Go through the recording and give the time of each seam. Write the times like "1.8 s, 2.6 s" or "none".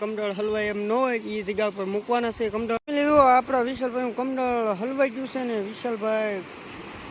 2.8 s